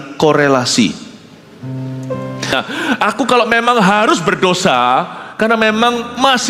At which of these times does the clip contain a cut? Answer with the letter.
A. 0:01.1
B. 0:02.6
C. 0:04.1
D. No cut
B